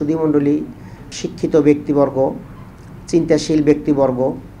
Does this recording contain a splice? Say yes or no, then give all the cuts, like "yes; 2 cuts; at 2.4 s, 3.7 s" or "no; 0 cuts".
yes; 1 cut; at 1.2 s